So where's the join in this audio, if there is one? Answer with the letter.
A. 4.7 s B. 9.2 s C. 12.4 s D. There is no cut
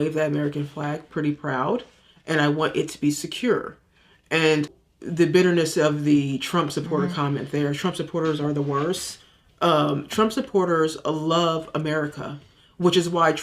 A